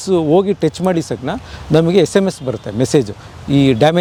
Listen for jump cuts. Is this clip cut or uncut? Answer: uncut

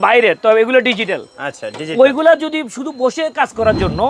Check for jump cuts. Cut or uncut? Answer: uncut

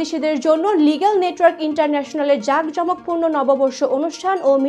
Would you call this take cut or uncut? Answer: uncut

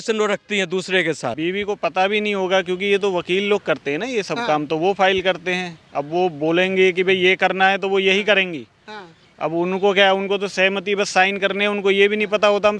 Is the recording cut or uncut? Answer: cut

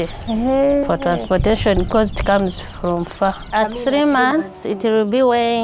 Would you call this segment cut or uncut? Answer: cut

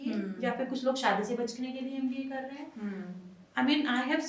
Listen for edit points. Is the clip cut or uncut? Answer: uncut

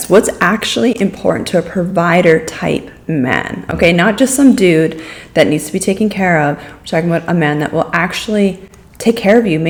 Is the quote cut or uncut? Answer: uncut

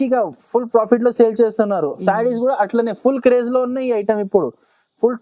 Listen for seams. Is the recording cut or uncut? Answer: uncut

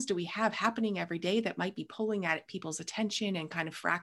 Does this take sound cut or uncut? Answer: uncut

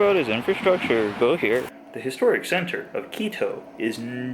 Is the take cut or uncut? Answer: cut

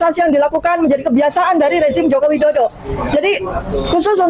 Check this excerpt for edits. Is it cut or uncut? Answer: uncut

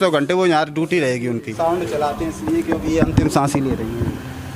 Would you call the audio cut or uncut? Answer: cut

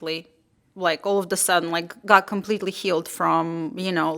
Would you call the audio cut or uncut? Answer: uncut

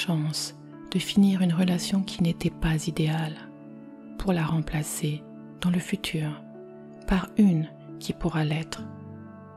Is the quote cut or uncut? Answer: uncut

